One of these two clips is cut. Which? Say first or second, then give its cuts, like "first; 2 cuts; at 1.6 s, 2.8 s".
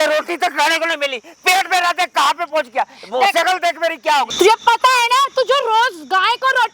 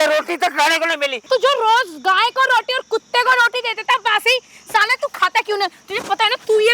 second; 1 cut; at 1.2 s